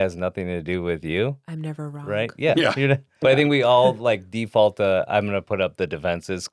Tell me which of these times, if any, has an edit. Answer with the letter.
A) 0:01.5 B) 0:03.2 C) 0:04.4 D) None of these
B